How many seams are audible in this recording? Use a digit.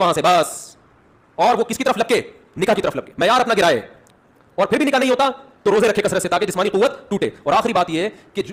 0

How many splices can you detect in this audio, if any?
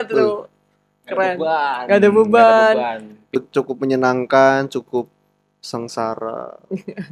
1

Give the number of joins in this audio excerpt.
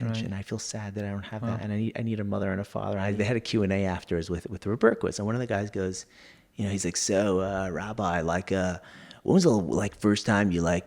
1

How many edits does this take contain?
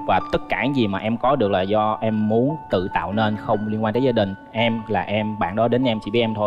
0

